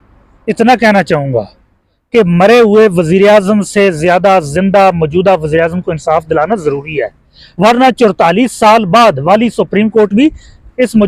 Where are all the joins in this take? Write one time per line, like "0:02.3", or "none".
none